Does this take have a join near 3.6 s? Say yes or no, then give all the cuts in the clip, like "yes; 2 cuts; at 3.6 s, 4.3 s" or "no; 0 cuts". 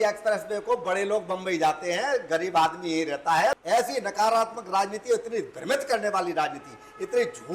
yes; 1 cut; at 3.6 s